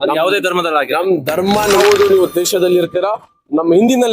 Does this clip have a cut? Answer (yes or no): yes